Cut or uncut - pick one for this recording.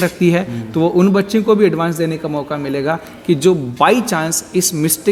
uncut